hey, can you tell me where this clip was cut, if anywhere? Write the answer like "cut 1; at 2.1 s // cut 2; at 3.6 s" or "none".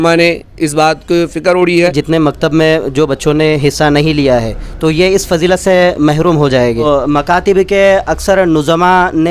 cut 1; at 2.0 s // cut 2; at 6.8 s